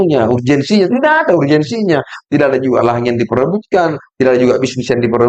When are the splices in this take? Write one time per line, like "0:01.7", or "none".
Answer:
none